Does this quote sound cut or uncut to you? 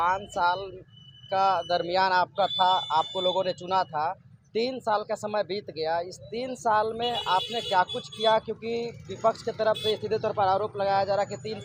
uncut